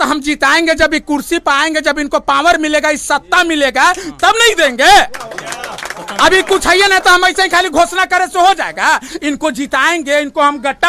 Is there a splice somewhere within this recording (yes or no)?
no